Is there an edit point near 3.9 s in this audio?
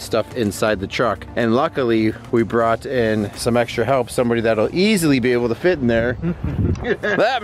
no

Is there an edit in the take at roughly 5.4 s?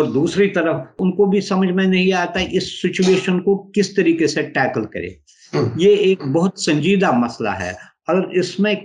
no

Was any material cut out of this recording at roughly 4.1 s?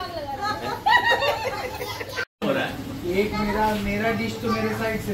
no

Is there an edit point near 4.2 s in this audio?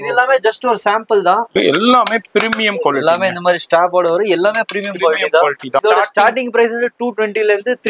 no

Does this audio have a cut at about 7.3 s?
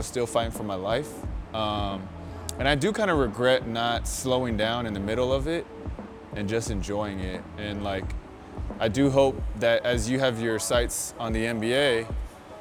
no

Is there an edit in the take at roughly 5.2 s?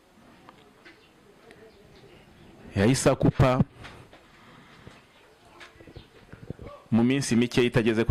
no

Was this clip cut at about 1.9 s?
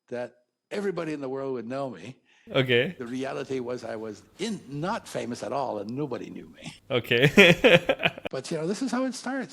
yes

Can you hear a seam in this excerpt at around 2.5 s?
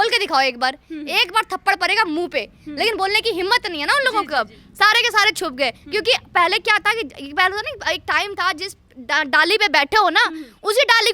no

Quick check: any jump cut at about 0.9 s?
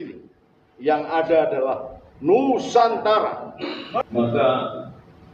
no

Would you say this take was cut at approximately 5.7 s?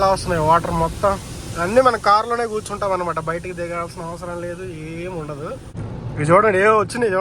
yes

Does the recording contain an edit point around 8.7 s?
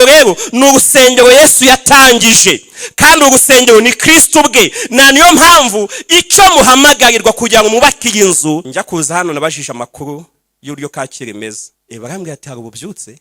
yes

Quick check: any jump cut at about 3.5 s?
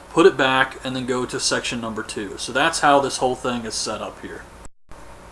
no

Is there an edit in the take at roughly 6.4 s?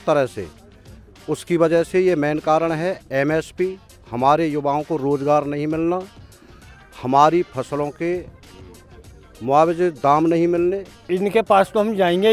no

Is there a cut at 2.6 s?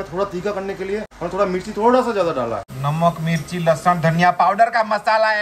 yes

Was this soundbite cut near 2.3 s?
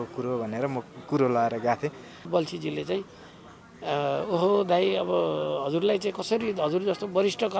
yes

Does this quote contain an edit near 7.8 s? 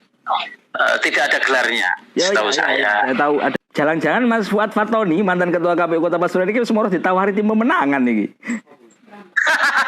no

